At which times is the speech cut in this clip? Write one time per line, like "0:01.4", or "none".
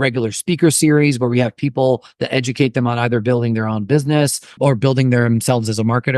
0:04.5